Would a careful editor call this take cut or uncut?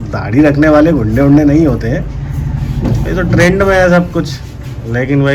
uncut